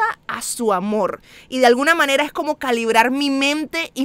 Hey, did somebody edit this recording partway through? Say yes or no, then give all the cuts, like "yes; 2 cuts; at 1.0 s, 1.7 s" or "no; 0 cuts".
no; 0 cuts